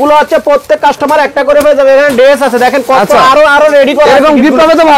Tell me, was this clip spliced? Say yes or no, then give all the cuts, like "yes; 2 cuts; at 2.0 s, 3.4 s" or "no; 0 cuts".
no; 0 cuts